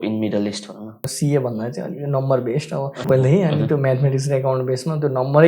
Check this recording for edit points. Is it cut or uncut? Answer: cut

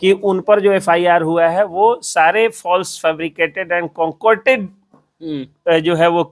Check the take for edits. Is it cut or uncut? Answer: uncut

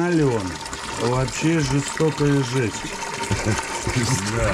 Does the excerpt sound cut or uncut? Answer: uncut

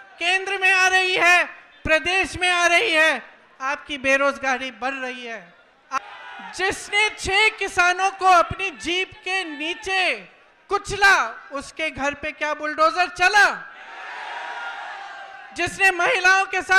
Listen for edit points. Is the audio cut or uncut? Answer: cut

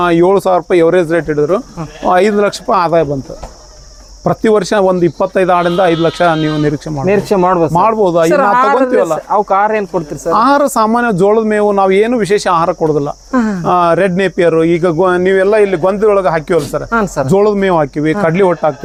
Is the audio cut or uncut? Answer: uncut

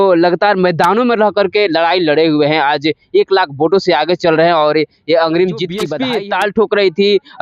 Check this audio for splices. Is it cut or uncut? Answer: cut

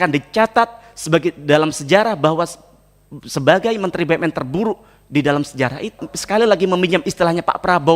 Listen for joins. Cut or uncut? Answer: cut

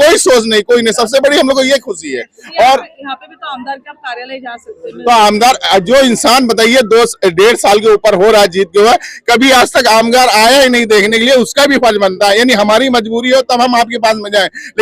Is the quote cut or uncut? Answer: uncut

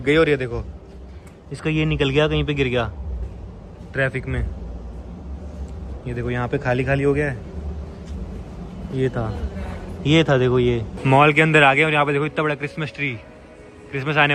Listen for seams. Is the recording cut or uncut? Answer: uncut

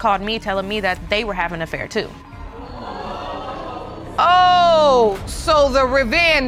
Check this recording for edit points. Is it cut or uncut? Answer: uncut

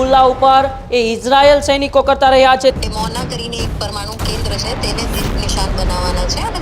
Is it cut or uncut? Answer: cut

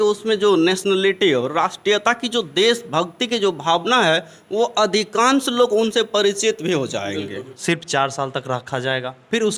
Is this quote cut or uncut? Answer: cut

